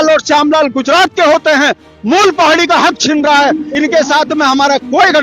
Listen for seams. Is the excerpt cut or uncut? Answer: cut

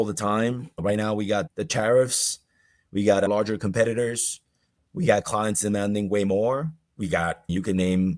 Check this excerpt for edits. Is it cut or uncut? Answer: cut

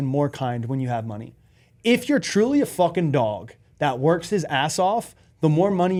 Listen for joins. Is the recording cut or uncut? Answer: uncut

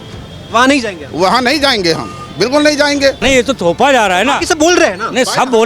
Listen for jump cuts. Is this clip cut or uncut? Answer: cut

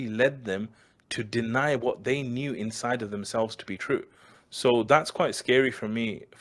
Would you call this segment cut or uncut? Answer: uncut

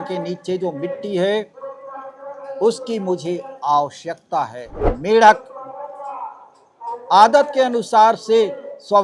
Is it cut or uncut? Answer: cut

